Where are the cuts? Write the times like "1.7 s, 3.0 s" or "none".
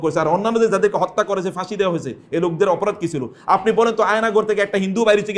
none